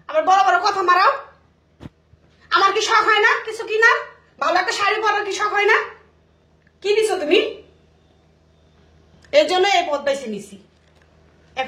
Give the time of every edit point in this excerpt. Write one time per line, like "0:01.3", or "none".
none